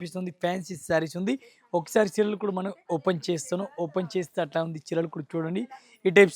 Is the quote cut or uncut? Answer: uncut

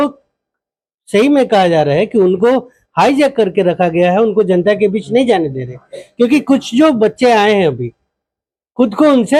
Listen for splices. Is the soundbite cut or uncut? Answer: uncut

